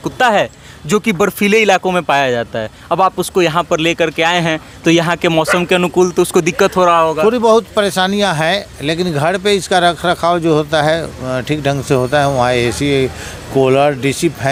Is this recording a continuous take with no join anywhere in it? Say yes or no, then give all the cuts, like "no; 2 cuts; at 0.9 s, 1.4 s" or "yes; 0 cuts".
yes; 0 cuts